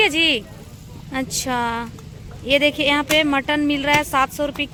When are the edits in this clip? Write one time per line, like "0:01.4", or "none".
none